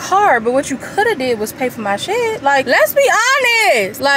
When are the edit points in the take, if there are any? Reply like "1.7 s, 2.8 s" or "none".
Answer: 2.7 s